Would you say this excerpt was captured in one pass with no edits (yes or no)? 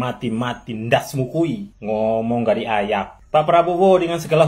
no